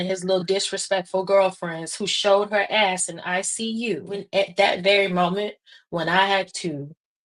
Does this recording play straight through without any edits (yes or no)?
no